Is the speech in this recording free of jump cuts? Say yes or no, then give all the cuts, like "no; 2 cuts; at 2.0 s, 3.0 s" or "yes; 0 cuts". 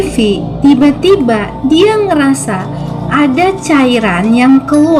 yes; 0 cuts